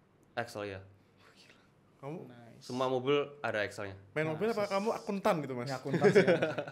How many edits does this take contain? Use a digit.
0